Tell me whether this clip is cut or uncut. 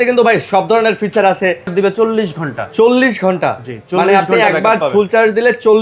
cut